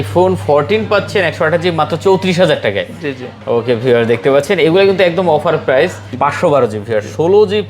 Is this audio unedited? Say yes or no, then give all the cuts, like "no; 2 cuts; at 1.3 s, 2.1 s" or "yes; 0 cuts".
no; 1 cut; at 6.1 s